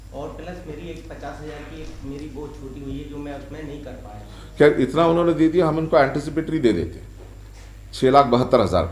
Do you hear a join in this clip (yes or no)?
no